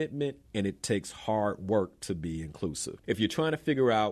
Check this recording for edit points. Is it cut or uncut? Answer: cut